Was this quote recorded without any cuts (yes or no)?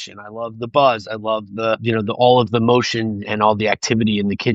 yes